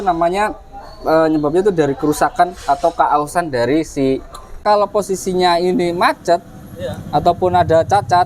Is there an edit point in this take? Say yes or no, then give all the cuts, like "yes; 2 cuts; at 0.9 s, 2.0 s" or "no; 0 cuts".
yes; 1 cut; at 4.6 s